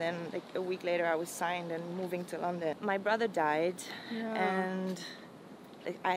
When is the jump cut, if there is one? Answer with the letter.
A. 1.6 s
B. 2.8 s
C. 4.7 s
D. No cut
B